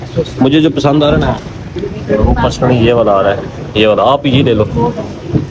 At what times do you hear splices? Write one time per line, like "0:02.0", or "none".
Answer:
none